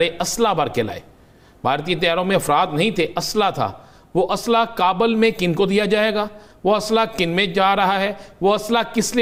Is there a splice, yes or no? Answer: no